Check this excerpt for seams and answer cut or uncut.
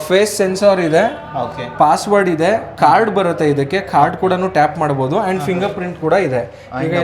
uncut